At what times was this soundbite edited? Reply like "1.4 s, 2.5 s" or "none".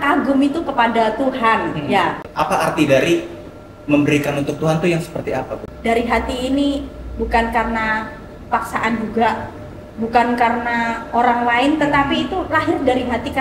2.2 s, 5.6 s